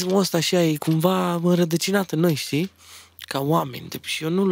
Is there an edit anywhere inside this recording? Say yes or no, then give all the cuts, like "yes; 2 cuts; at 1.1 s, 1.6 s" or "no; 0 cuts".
no; 0 cuts